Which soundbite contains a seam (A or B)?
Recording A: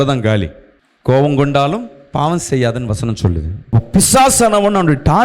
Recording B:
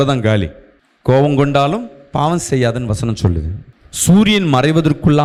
A